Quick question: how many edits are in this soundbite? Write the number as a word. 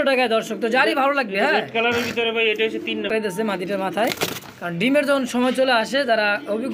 one